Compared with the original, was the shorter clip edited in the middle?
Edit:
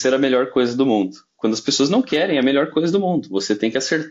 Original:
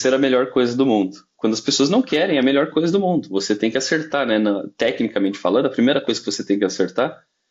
no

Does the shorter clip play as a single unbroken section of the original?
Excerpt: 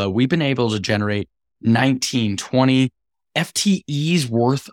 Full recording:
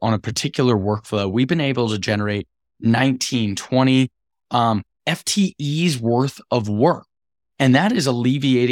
no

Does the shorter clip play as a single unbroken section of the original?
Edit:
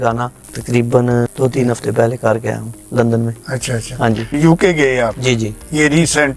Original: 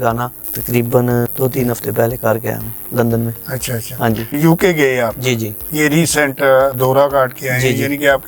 yes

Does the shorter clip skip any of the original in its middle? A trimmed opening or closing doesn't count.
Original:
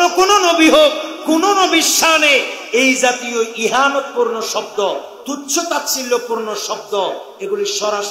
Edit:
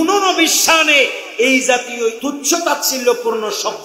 yes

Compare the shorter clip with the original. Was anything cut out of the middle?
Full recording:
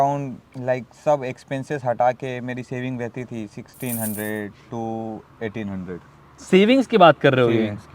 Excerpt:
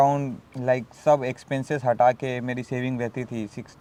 no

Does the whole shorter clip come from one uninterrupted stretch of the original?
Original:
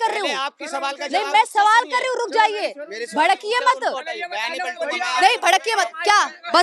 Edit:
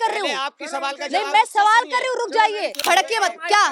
no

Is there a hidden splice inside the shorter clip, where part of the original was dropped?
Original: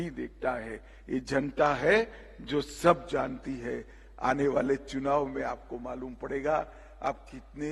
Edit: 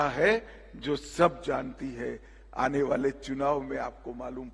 no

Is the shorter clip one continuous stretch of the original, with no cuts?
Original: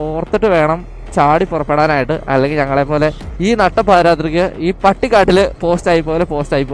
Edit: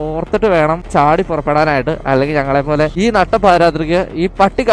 no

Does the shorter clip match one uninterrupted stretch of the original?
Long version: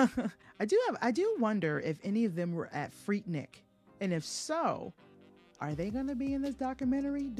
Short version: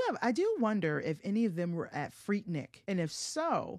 no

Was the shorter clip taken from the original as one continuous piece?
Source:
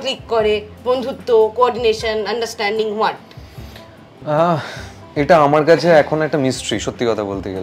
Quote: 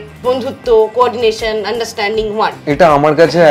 no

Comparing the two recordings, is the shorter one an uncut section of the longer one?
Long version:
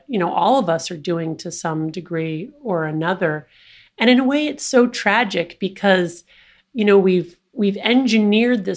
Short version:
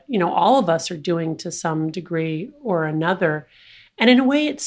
yes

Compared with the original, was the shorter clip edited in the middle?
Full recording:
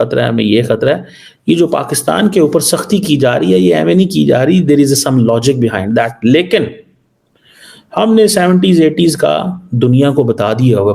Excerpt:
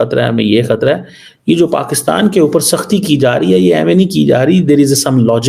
no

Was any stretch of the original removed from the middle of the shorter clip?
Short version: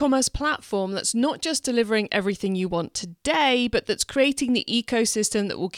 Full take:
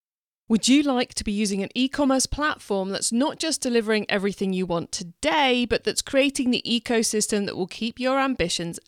no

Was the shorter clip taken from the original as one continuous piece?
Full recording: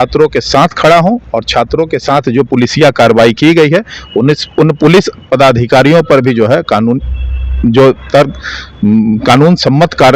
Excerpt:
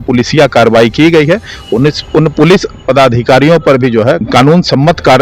no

